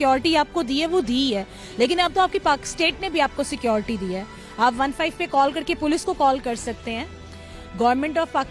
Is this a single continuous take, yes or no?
yes